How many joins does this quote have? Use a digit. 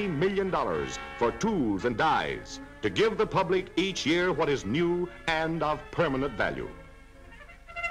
0